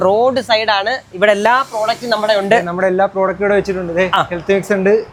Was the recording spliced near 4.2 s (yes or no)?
no